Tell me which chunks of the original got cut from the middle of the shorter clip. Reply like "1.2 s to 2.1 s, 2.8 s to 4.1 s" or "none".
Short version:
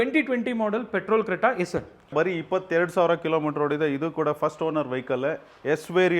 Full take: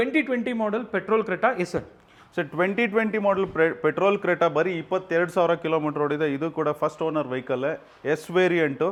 2.1 s to 4.5 s